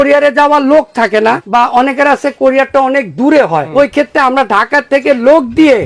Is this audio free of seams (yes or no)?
no